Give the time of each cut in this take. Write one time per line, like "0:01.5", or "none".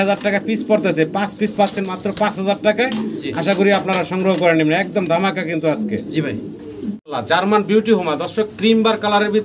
none